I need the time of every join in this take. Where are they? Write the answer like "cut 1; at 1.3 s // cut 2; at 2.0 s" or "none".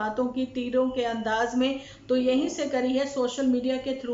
none